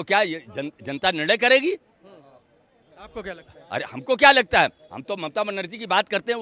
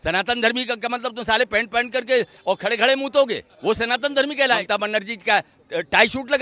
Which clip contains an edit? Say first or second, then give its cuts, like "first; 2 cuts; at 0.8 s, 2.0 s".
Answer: second; 2 cuts; at 3.5 s, 4.6 s